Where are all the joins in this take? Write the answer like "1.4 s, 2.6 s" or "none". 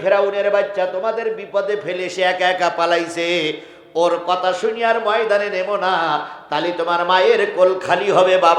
none